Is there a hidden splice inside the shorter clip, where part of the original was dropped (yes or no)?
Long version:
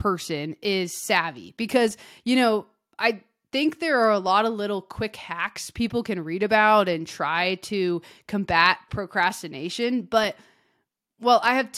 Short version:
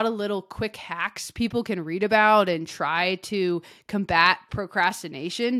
no